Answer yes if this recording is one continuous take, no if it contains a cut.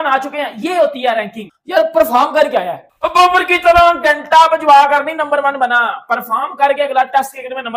yes